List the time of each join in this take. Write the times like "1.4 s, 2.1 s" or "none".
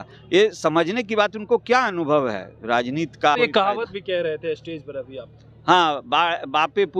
3.3 s

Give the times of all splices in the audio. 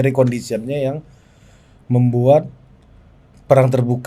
none

